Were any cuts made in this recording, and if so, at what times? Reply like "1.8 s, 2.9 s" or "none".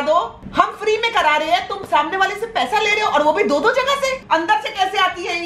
4.2 s